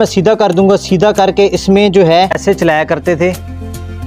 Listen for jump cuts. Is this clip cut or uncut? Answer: cut